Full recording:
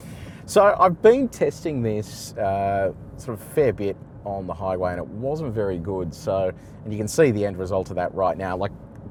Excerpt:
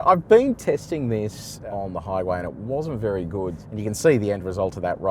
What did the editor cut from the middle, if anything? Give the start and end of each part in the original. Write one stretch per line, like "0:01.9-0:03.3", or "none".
0:02.3-0:04.1
0:06.1-0:06.7